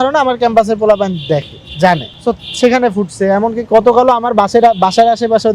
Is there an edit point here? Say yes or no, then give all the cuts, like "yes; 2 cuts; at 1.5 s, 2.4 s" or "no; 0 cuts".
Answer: no; 0 cuts